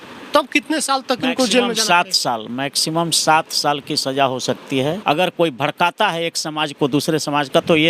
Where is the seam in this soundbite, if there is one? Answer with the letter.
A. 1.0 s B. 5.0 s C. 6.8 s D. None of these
B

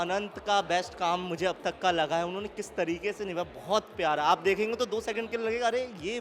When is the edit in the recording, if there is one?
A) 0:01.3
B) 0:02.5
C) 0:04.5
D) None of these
D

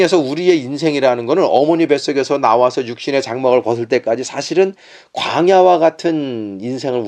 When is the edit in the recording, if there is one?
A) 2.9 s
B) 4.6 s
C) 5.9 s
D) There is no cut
D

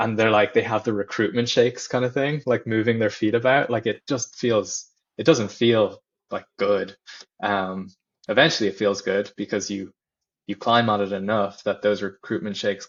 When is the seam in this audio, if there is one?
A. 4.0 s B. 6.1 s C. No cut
C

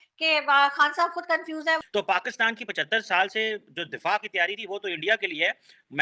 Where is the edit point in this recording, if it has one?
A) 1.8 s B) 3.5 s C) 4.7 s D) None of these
A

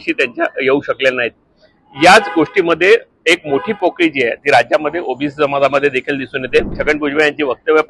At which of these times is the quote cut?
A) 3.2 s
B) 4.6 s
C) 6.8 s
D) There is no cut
C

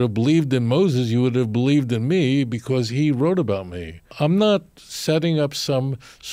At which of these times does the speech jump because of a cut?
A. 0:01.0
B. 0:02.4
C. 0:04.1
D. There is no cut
C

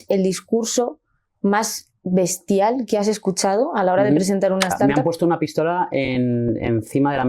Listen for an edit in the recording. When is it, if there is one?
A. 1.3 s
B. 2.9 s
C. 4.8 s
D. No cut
C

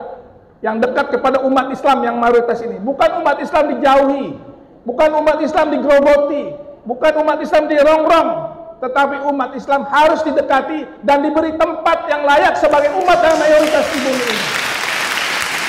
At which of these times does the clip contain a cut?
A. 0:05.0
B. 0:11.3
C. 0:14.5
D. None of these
C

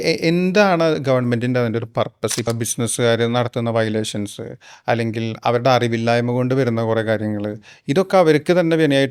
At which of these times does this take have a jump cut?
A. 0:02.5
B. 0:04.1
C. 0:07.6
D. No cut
A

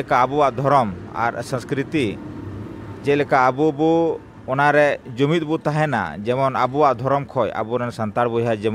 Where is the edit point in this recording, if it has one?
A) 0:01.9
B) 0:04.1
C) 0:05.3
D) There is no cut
D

